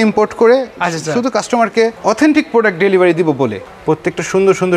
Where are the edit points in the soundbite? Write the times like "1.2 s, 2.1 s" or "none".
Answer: 2.0 s, 3.7 s